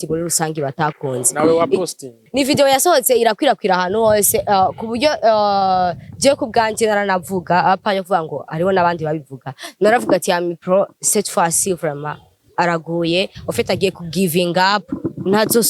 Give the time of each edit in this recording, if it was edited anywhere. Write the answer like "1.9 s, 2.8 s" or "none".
2.2 s